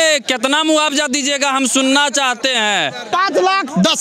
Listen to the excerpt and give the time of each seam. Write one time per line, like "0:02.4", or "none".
0:03.1